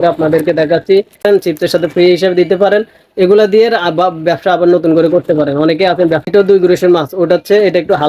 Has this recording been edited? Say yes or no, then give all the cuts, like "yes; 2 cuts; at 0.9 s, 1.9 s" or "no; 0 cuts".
yes; 2 cuts; at 1.2 s, 6.3 s